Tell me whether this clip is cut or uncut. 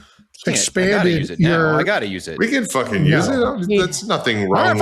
uncut